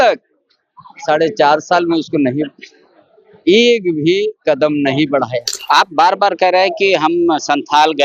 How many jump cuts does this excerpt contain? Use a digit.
1